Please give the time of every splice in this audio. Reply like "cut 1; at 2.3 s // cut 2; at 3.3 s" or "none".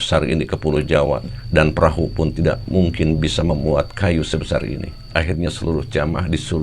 cut 1; at 5.1 s